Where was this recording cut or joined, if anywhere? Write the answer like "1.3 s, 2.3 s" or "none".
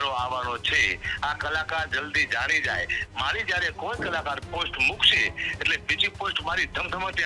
3.0 s